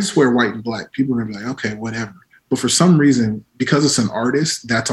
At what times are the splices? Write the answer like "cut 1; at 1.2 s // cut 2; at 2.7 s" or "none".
none